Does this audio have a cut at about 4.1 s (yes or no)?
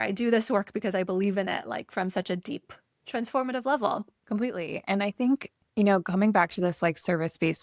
yes